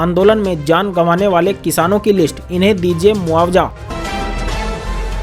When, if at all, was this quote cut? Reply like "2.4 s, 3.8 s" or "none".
3.8 s

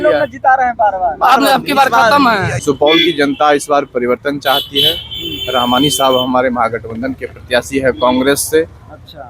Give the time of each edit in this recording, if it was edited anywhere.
2.5 s

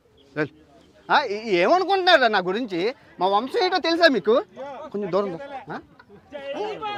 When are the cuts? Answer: none

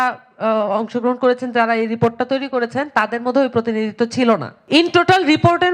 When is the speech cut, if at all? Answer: 4.5 s

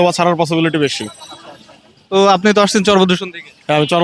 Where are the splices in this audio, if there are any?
none

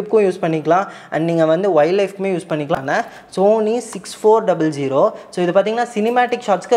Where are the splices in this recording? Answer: 2.8 s

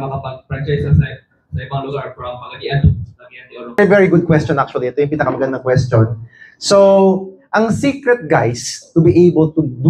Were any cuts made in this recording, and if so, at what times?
3.8 s

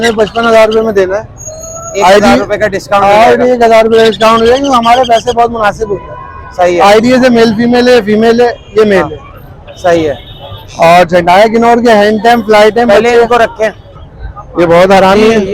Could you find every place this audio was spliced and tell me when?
none

